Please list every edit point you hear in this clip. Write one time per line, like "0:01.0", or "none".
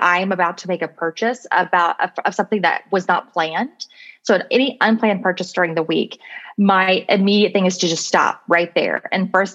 none